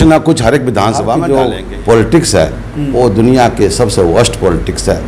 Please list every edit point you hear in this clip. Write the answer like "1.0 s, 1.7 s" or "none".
1.2 s